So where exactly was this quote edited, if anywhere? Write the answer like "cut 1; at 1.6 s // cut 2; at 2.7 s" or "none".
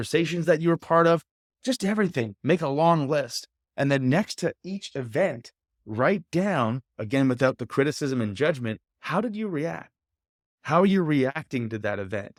none

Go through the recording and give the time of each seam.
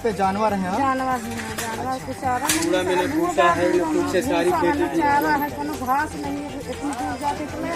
none

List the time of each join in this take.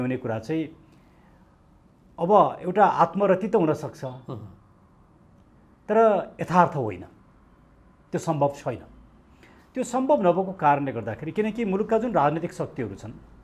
none

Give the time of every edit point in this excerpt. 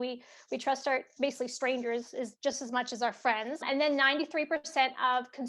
none

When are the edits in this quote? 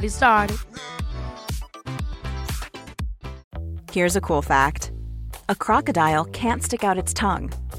cut 1; at 3.4 s

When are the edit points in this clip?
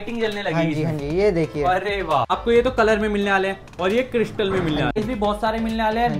cut 1; at 2.3 s // cut 2; at 4.9 s

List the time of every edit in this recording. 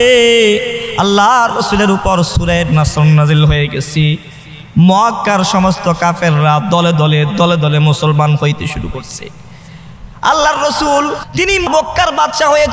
cut 1; at 11.7 s

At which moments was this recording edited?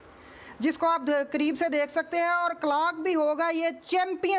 none

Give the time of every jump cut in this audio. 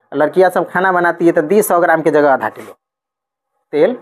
none

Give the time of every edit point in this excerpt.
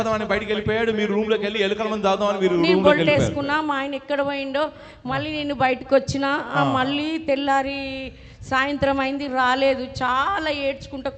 none

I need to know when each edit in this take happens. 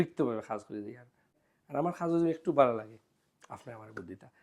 cut 1; at 1.3 s

